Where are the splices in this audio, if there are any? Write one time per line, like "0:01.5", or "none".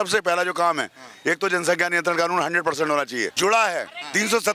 0:03.3